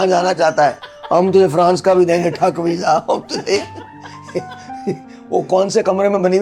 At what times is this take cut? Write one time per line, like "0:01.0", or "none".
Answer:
none